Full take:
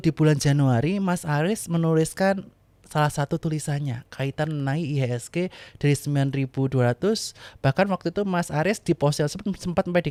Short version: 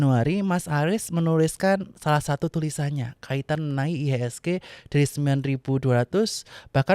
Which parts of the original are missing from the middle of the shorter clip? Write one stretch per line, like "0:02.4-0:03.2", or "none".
0:02.5-0:02.8